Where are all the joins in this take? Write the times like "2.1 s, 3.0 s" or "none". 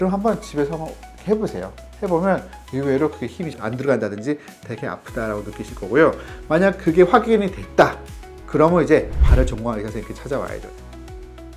10.7 s

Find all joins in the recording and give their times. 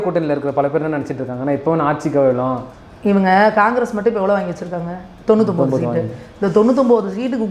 2.7 s

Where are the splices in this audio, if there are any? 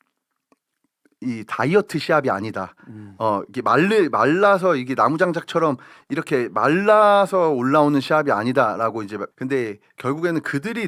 9.2 s

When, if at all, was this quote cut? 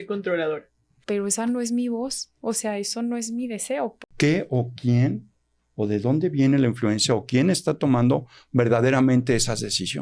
1.0 s, 4.0 s

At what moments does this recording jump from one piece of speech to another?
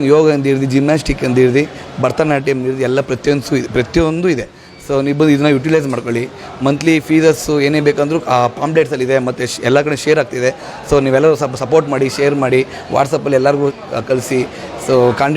none

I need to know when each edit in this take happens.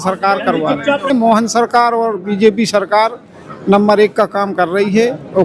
1.1 s

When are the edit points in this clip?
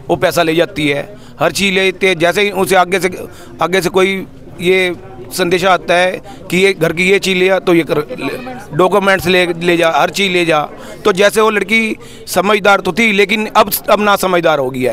none

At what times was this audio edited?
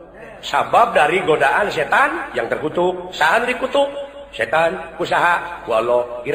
none

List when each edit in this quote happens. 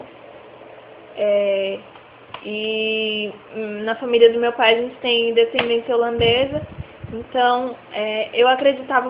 4.4 s

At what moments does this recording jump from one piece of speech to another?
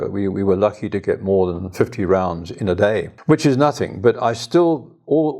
3.1 s

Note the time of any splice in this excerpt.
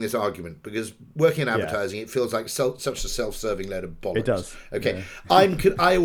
none

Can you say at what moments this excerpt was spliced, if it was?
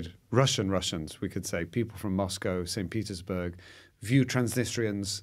none

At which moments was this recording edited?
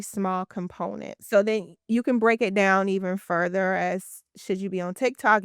1.2 s

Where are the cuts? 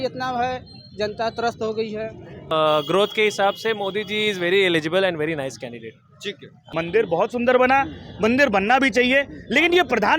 2.5 s, 6.7 s

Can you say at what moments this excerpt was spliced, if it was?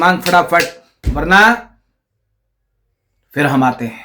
none

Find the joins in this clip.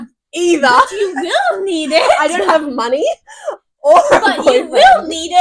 none

